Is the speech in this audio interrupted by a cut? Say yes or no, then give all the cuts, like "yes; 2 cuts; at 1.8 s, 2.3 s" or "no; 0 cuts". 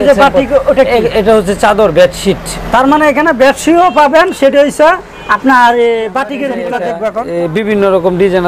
yes; 1 cut; at 6.5 s